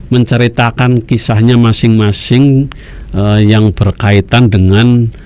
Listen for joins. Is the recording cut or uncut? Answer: uncut